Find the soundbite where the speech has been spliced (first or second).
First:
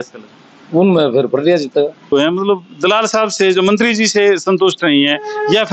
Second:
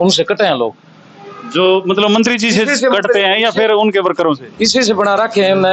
first